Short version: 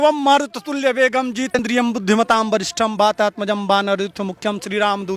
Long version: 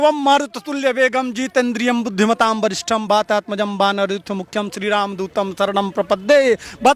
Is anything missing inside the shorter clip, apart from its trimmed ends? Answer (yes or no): yes